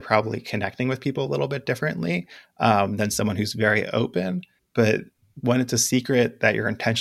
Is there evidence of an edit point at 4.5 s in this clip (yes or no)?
yes